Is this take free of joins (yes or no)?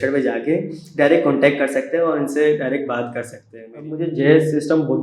no